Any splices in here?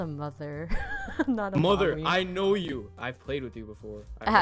yes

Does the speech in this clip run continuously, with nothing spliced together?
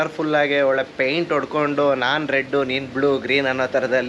yes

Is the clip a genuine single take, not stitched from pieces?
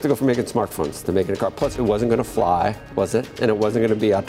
no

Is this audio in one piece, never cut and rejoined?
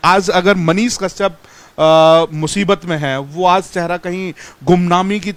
yes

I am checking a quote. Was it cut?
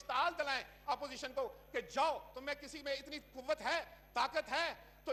no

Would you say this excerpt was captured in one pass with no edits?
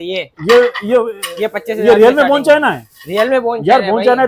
yes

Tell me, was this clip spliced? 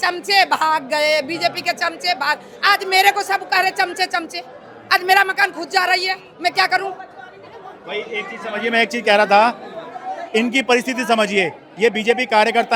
no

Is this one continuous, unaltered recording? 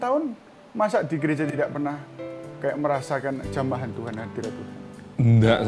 yes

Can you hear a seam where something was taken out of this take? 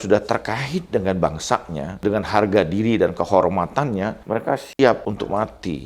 yes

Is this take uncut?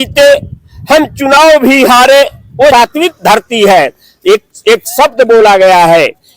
no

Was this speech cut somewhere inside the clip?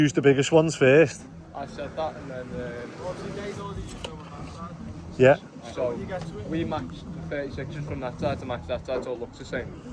no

